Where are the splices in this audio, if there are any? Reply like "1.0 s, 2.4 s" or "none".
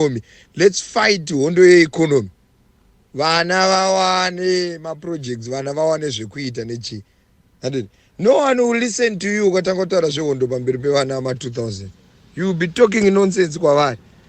none